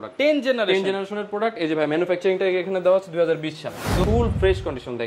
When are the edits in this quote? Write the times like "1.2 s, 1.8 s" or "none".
4.0 s